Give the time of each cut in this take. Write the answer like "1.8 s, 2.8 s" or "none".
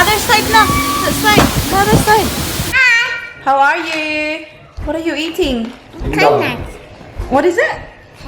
2.7 s